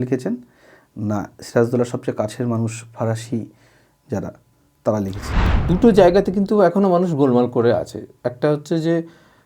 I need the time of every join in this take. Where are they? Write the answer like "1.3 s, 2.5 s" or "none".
5.5 s